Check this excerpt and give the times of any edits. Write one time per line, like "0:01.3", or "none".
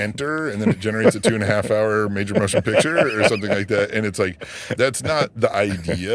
none